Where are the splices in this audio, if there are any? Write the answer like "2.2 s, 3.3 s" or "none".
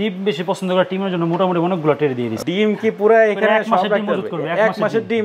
2.3 s